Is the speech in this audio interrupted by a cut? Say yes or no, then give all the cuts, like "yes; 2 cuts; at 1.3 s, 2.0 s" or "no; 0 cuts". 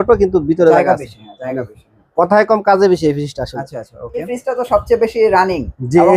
yes; 1 cut; at 4.2 s